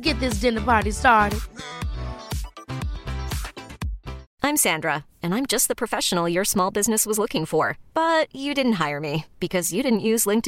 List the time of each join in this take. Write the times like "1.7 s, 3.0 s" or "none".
4.2 s

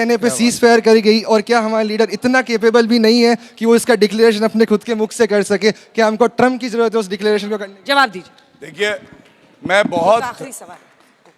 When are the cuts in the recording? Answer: none

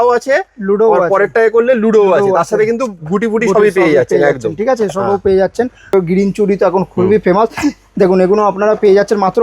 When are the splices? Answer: 5.9 s

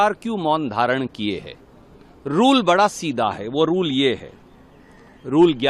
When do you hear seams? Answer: none

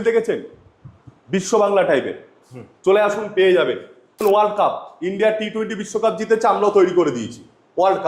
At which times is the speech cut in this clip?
4.2 s

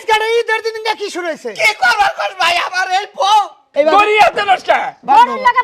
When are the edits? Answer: 3.4 s

